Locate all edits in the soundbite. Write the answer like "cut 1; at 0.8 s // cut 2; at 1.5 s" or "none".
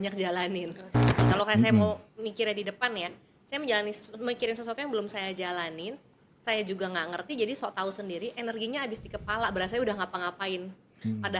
cut 1; at 1.2 s